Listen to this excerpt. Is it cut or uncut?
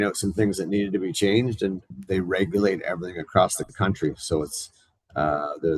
cut